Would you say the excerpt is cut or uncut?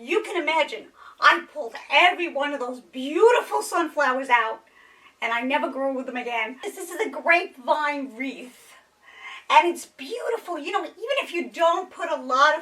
cut